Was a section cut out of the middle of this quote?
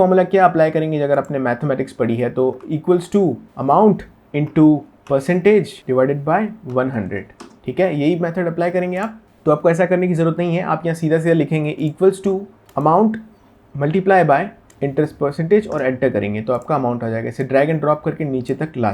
yes; 4 cuts; at 3.5 s, 5.8 s, 12.6 s, 14.6 s

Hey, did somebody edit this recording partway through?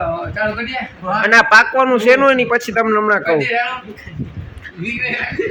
no; 0 cuts

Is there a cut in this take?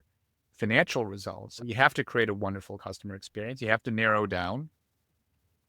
yes; 1 cut; at 1.6 s

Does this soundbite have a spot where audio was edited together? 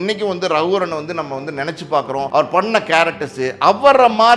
yes; 1 cut; at 2.3 s

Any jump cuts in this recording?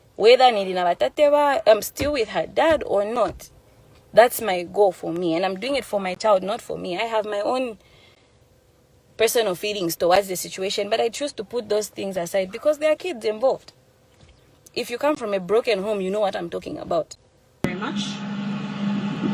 yes; 1 cut; at 17.5 s

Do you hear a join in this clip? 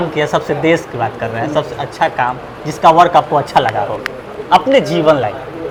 no; 0 cuts

